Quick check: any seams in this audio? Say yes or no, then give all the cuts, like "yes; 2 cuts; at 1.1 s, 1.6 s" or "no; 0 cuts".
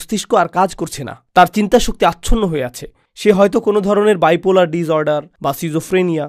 no; 0 cuts